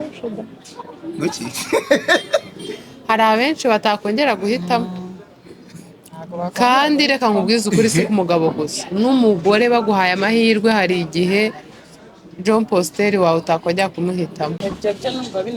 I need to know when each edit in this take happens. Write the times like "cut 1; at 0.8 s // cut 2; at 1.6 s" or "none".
cut 1; at 14.5 s